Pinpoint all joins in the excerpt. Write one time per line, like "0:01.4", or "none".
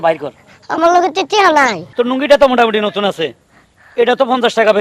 0:01.8

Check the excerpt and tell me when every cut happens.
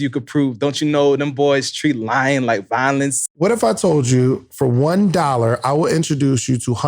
0:03.2

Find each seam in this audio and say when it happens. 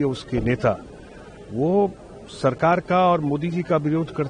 none

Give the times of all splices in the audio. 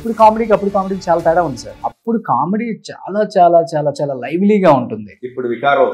0:01.7

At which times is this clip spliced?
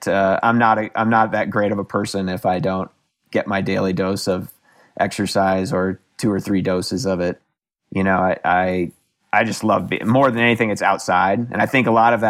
0:07.4

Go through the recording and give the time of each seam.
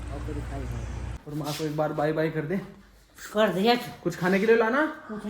0:01.0

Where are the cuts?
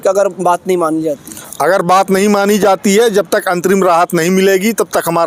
none

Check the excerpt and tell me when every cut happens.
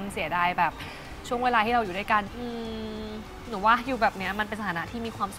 0:02.3

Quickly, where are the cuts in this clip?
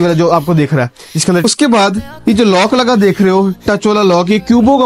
0:01.4

